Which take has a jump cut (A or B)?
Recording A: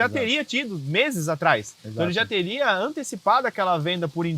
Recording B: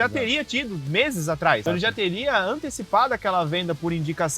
B